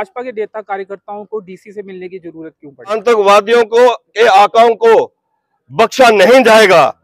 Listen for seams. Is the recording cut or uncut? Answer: cut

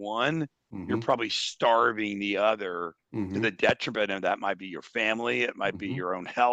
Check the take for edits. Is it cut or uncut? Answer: uncut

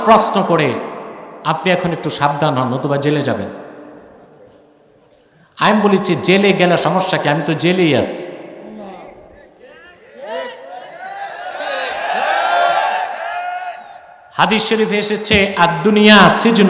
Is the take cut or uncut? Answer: uncut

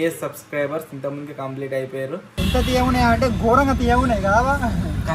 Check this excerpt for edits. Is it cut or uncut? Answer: cut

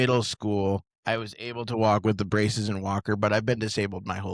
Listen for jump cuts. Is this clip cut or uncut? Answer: cut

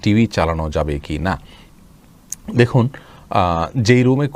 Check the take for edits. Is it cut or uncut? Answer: uncut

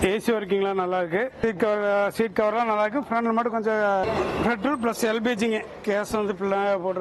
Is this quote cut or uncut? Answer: cut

